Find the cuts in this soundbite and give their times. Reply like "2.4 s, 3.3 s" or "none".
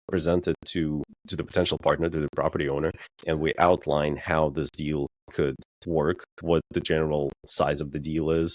1.3 s, 3.1 s